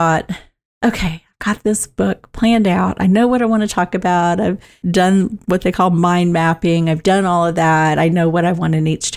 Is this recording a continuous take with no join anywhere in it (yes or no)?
yes